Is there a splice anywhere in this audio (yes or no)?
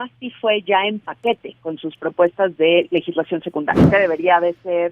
yes